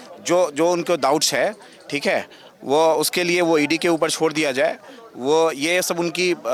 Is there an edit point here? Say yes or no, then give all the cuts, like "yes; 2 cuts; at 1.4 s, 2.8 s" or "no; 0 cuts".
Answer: no; 0 cuts